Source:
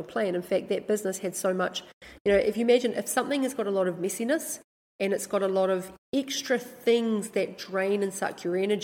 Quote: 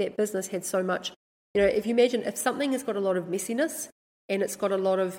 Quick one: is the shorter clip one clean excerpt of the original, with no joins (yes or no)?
yes